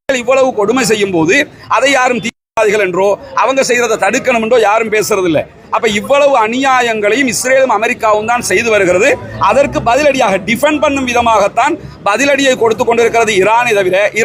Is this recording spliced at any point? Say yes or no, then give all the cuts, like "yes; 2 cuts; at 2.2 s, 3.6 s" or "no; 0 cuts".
no; 0 cuts